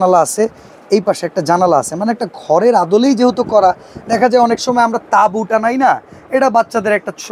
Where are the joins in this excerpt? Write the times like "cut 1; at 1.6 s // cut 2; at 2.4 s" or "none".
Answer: none